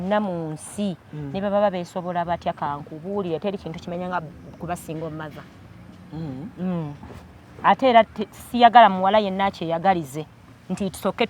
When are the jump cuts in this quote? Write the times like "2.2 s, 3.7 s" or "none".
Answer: none